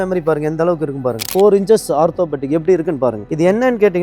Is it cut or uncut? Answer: cut